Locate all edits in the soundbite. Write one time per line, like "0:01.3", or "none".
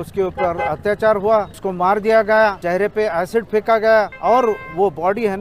0:01.6
0:02.6
0:04.1